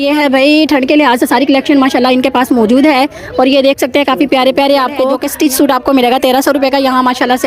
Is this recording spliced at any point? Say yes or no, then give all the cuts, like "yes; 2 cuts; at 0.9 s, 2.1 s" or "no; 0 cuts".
yes; 1 cut; at 5.2 s